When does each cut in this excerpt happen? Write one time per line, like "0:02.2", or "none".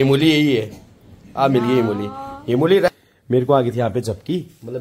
0:03.0